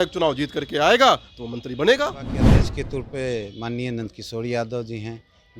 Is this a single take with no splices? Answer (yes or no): no